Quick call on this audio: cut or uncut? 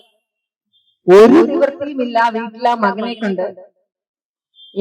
uncut